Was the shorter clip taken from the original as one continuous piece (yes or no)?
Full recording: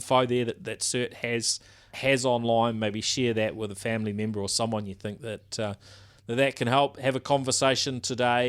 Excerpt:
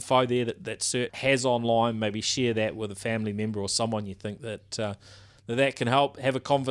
no